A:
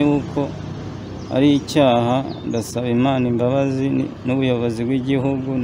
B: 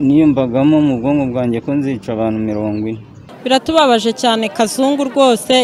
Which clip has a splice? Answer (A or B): B